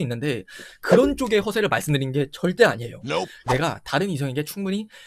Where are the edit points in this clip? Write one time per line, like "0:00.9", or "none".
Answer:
0:03.3